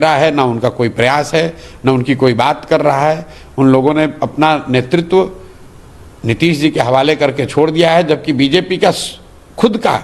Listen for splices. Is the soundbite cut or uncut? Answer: uncut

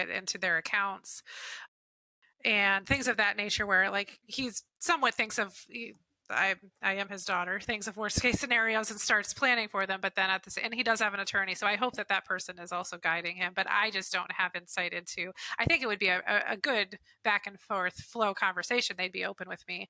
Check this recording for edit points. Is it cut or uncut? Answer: uncut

